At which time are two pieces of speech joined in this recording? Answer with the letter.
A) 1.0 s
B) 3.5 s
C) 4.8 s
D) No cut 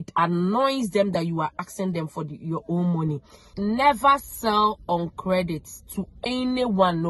B